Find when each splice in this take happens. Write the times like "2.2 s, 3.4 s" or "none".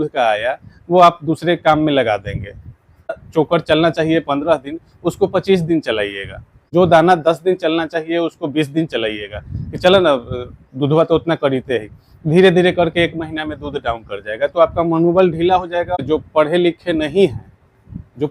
3.2 s, 6.6 s, 15.9 s